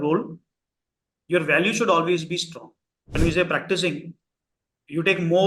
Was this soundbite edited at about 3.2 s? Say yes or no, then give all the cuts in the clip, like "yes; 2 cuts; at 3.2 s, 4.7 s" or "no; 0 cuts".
yes; 1 cut; at 3.2 s